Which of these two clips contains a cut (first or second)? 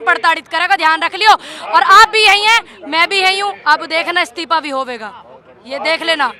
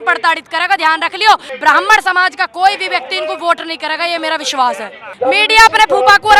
second